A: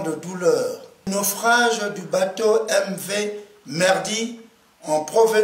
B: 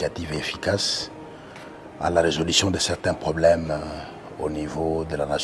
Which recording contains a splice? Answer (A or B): A